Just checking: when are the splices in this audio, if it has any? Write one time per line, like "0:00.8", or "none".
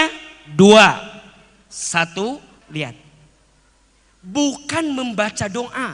0:02.6